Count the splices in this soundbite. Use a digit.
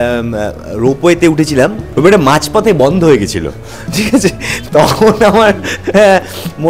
2